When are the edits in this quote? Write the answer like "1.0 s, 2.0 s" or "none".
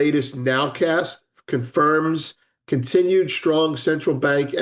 none